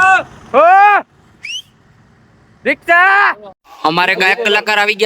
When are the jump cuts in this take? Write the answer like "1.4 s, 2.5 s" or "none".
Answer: 3.6 s